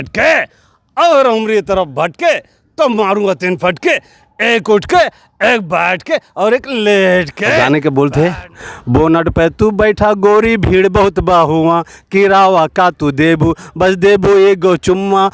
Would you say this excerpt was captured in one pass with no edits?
no; 1 cut; at 7.6 s

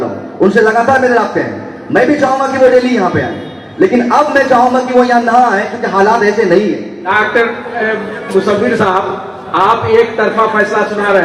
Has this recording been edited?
yes; 1 cut; at 7.0 s

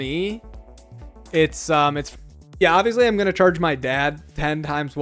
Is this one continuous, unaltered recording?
no; 1 cut; at 2.0 s

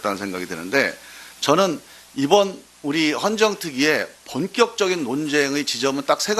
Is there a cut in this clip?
yes; 1 cut; at 2.7 s

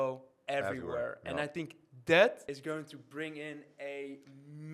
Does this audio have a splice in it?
yes; 1 cut; at 2.4 s

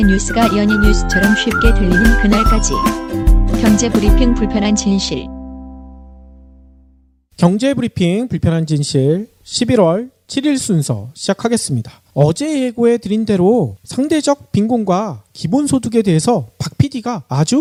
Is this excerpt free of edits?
yes; 0 cuts

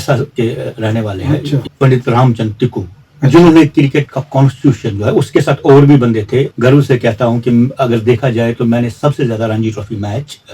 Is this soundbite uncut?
no; 2 cuts; at 1.6 s, 6.5 s

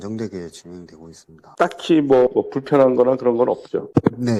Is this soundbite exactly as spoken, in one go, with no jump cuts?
yes; 0 cuts

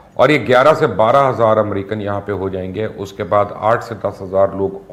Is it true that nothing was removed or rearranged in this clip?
yes; 0 cuts

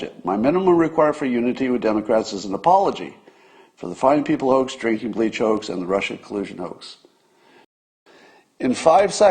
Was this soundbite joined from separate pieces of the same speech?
yes; 1 cut; at 7.8 s

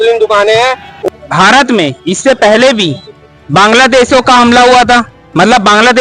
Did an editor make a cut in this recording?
yes; 1 cut; at 1.0 s

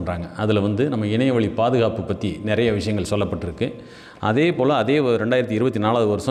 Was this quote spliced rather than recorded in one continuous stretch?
no; 0 cuts

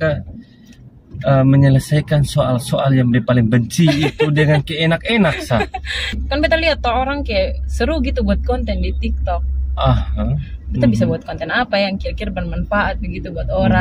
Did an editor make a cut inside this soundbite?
yes; 1 cut; at 6.2 s

